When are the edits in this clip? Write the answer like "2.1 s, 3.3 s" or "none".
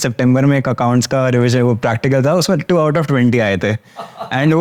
none